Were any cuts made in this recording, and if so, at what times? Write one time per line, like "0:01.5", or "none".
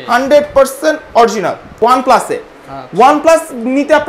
0:01.7